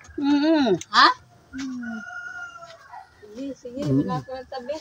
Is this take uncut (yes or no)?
yes